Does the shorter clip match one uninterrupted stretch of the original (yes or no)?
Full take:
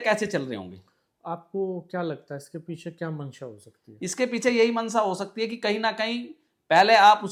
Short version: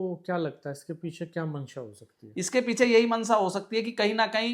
yes